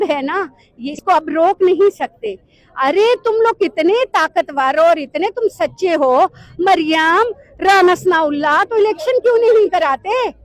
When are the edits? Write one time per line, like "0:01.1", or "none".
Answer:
0:00.9